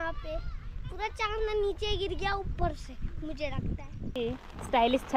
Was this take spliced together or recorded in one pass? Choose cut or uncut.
cut